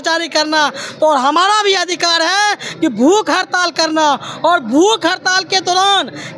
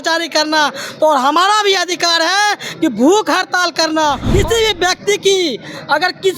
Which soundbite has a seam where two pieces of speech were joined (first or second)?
second